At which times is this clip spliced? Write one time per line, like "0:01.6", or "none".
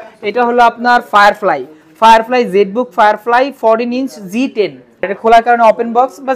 0:05.1